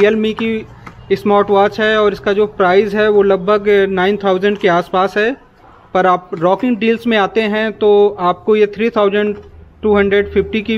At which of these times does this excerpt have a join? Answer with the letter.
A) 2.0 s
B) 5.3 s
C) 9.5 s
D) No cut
D